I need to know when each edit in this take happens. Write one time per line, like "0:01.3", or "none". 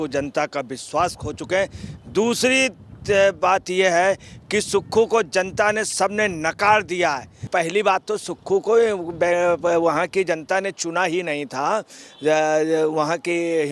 0:07.3